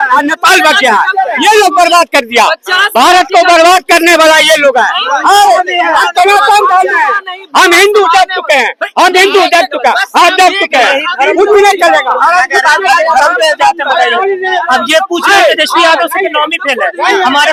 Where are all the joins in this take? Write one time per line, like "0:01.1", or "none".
none